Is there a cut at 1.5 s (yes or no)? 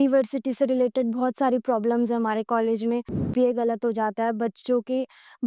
no